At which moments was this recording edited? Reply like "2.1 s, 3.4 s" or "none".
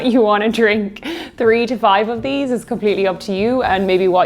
none